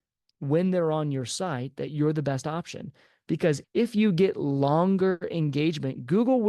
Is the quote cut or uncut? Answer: cut